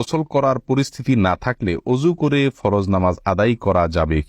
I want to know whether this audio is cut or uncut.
uncut